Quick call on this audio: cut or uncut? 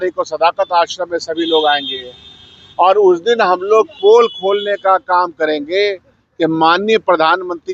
uncut